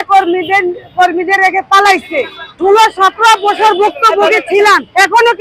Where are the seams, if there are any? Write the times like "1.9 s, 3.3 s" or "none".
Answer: 2.5 s